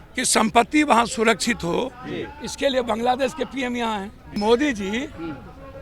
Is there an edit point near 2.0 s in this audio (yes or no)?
no